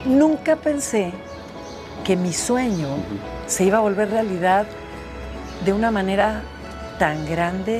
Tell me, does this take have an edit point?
no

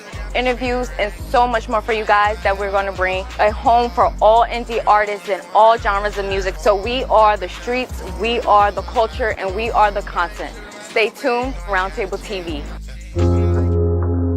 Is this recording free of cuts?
yes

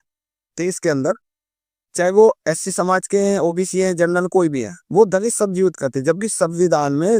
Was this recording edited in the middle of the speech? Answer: no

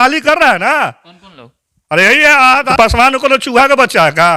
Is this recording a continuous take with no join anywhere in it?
no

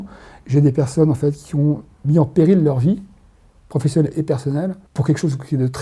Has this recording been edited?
yes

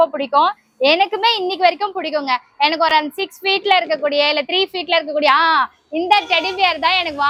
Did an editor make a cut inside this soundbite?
no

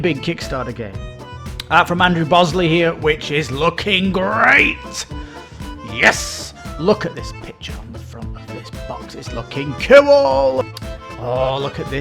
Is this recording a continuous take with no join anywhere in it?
no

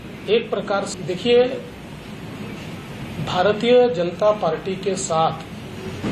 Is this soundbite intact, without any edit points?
no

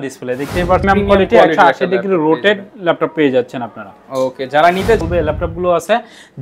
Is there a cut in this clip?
yes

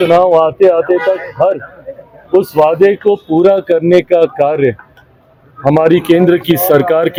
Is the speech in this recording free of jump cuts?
yes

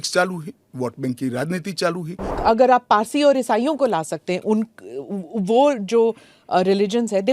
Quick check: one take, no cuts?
no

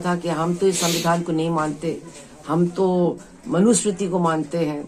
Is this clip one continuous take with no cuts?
yes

